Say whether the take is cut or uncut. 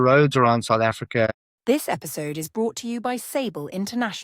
cut